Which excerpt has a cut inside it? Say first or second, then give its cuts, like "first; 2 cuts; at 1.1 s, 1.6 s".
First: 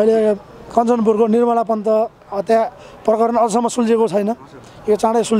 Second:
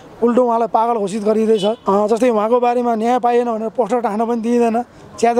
second; 1 cut; at 1.8 s